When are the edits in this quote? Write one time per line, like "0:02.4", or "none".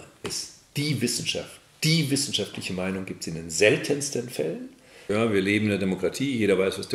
0:04.9